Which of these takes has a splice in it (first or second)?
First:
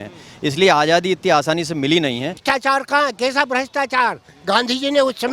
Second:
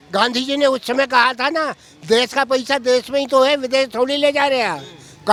first